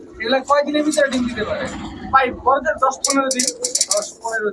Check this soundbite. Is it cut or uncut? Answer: uncut